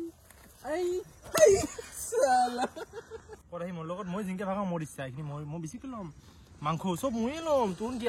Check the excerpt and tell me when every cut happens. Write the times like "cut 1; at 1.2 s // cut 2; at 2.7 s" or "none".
cut 1; at 3.3 s

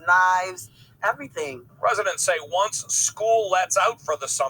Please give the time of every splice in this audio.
cut 1; at 1.6 s

